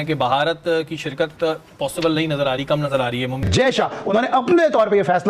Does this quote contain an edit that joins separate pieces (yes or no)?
yes